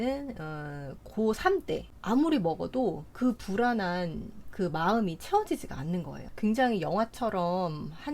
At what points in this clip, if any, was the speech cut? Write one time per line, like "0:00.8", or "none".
0:01.9
0:06.2

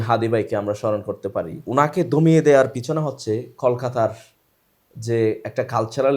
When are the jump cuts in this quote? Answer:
0:01.6

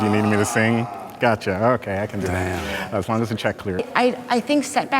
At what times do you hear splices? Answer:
0:03.9

